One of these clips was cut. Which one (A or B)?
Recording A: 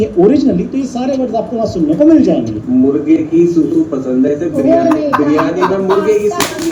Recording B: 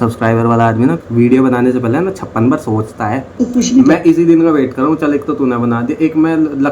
B